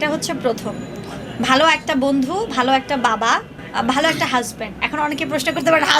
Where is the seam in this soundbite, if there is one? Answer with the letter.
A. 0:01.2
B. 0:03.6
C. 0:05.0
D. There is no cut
B